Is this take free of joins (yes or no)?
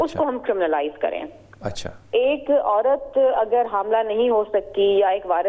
yes